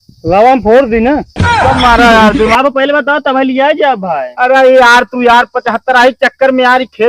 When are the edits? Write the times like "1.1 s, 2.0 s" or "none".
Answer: 2.6 s